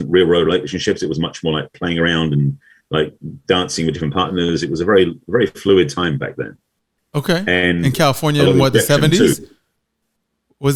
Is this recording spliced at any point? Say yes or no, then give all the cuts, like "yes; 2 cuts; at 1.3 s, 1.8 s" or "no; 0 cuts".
no; 0 cuts